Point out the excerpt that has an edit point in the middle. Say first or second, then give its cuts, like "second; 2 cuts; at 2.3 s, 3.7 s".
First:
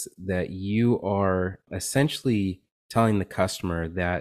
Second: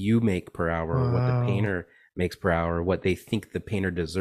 first; 1 cut; at 1.7 s